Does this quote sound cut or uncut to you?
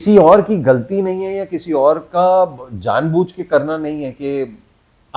uncut